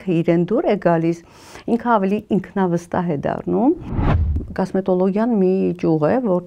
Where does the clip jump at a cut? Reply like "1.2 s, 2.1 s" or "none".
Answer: 4.4 s